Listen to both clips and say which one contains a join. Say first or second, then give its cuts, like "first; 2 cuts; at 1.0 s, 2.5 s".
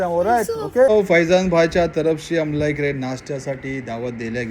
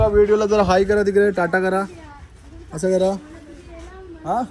first; 1 cut; at 0.9 s